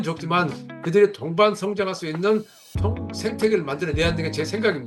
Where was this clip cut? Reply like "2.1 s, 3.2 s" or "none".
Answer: none